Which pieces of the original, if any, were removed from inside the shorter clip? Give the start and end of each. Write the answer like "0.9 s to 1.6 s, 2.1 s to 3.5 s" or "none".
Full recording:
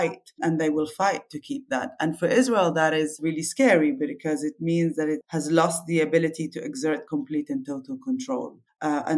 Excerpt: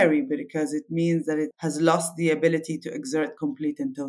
none